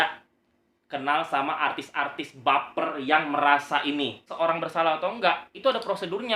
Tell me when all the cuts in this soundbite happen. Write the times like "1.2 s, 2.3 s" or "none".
4.4 s